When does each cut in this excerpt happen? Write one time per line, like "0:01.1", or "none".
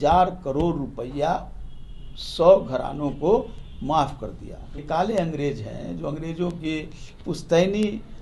0:04.8